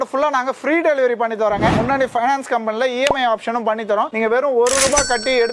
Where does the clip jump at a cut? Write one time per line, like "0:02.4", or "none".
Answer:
0:01.7